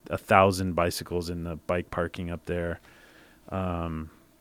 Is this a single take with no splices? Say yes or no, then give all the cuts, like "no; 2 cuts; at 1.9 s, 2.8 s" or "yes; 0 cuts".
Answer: yes; 0 cuts